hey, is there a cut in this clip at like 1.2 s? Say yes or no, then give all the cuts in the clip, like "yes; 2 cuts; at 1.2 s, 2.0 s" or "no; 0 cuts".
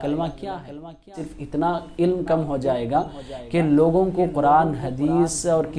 yes; 1 cut; at 1.2 s